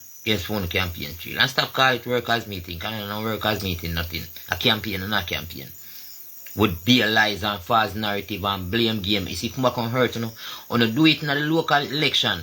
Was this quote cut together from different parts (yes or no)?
no